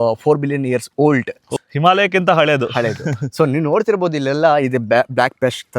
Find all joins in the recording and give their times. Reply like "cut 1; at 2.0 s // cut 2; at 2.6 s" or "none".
cut 1; at 1.4 s